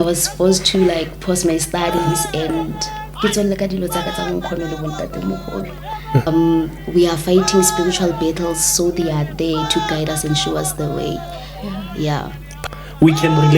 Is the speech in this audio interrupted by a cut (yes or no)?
yes